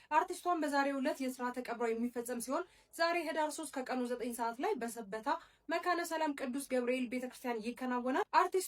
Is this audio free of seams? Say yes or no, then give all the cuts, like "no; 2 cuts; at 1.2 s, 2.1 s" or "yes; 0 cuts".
yes; 0 cuts